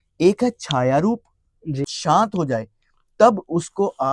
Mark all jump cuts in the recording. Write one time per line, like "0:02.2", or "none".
0:01.9